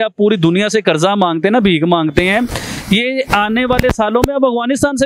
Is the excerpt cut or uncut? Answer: uncut